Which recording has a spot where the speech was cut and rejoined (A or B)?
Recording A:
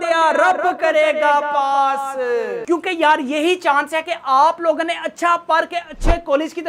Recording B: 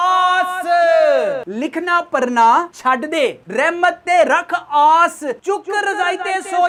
A